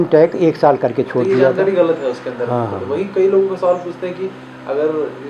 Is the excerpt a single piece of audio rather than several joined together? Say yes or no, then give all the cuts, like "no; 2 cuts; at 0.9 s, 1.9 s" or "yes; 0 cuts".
yes; 0 cuts